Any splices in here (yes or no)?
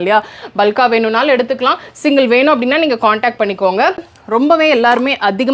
yes